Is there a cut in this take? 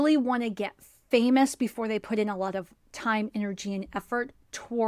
yes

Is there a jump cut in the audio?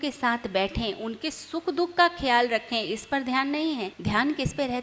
yes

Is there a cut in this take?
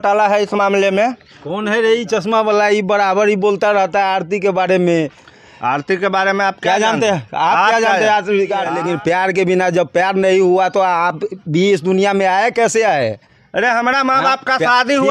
yes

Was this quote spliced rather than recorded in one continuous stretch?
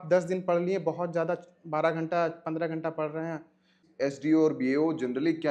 yes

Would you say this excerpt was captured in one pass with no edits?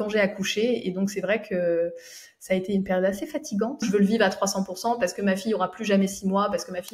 no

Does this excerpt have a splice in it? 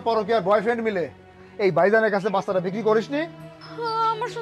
no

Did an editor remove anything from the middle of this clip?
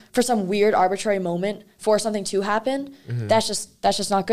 no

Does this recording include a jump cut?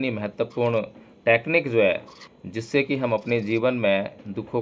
no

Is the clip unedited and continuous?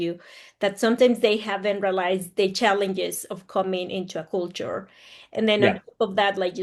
yes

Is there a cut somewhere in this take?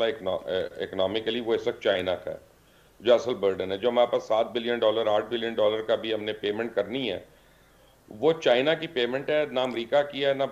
no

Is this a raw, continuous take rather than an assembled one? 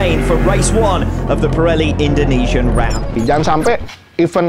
no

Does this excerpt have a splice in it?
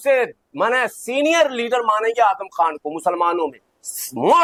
no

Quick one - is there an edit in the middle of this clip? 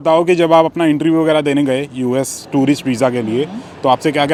no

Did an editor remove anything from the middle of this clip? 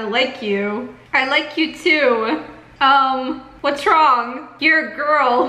yes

